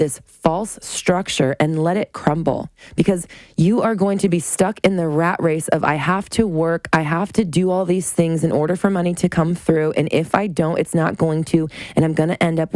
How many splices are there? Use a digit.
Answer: 1